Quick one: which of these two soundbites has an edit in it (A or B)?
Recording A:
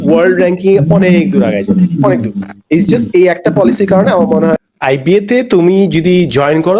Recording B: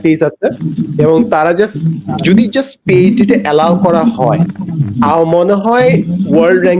A